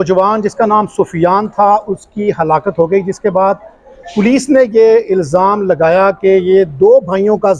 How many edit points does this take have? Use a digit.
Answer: 0